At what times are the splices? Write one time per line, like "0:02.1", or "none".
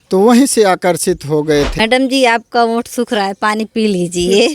0:01.7